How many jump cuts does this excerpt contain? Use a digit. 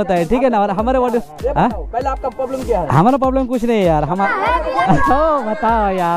1